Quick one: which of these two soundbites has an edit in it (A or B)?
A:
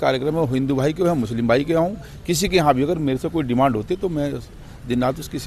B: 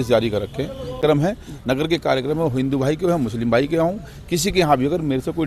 B